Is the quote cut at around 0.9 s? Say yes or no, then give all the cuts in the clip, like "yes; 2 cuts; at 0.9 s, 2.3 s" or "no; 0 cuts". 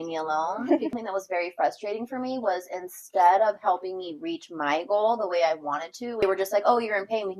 yes; 2 cuts; at 0.9 s, 6.2 s